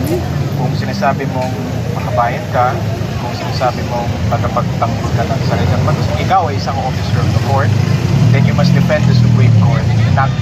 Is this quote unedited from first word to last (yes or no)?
yes